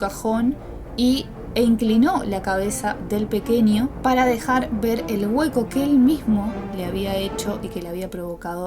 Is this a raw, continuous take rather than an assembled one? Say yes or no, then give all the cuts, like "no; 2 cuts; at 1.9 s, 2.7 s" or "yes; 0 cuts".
yes; 0 cuts